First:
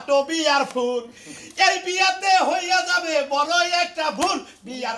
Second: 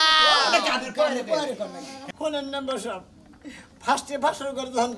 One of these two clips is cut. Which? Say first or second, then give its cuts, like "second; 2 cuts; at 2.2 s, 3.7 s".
second; 1 cut; at 2.1 s